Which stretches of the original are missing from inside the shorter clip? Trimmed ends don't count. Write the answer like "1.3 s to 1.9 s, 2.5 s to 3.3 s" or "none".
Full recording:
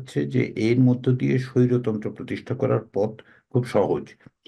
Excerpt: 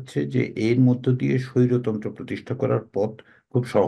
none